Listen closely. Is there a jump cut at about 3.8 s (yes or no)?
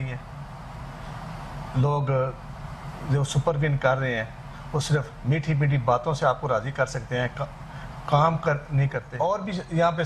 no